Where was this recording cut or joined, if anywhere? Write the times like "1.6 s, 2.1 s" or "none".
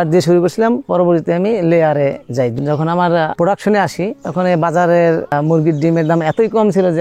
0.9 s, 2.5 s